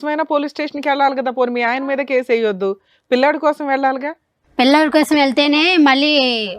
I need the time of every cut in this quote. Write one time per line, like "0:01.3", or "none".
none